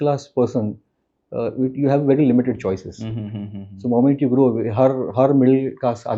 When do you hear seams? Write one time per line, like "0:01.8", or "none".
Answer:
none